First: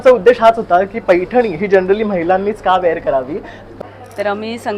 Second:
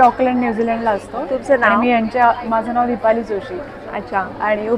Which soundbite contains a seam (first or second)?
first